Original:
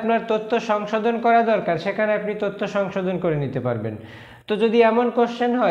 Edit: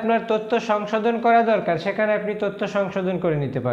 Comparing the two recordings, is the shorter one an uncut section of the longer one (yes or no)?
yes